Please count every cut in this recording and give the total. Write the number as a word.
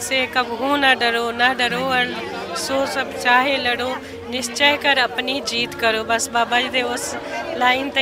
zero